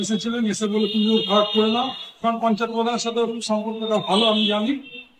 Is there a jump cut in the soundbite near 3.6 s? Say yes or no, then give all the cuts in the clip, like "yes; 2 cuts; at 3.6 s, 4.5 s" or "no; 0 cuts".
no; 0 cuts